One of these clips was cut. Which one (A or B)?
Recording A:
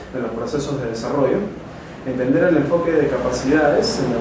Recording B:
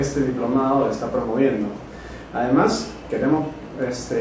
B